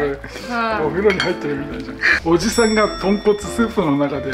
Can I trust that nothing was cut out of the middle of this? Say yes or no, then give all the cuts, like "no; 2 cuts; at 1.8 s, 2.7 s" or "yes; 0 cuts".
no; 1 cut; at 2.1 s